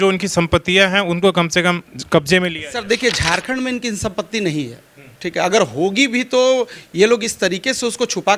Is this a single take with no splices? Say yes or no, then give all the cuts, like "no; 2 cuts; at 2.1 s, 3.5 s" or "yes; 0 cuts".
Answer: yes; 0 cuts